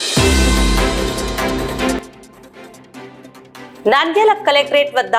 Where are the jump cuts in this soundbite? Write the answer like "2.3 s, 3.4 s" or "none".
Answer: 2.0 s, 3.8 s